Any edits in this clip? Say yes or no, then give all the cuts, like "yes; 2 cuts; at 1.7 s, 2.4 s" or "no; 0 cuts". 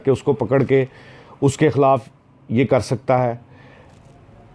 no; 0 cuts